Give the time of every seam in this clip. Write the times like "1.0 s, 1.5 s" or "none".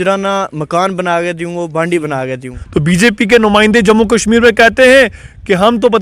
2.5 s